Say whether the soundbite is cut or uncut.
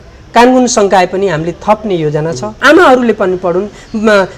cut